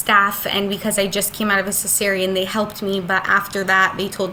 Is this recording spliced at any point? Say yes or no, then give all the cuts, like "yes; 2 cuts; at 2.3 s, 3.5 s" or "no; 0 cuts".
no; 0 cuts